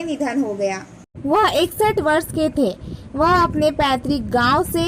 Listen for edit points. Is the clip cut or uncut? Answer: uncut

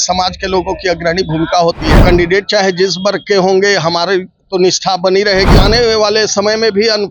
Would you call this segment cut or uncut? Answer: cut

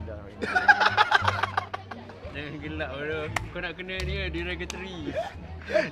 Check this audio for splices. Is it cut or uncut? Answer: uncut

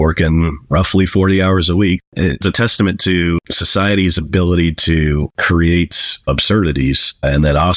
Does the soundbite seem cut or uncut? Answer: cut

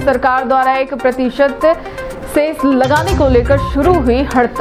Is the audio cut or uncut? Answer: uncut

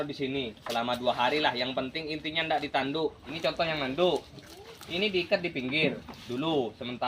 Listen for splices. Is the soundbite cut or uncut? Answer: cut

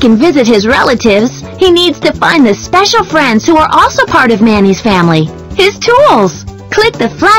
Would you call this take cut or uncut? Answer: uncut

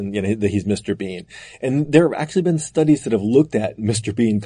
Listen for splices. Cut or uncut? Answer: uncut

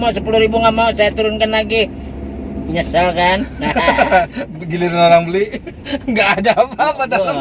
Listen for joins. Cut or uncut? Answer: cut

